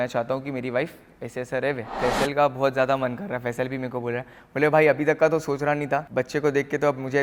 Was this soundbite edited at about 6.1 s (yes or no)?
yes